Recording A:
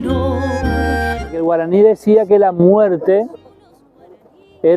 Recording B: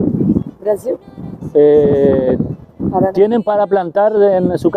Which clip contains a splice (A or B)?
A